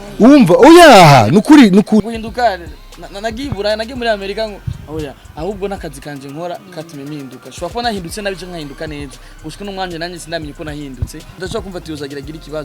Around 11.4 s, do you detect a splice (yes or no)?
yes